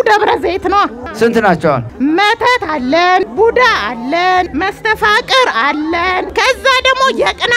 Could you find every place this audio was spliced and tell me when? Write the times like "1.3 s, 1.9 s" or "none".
1.0 s, 1.9 s, 3.2 s, 4.5 s, 6.3 s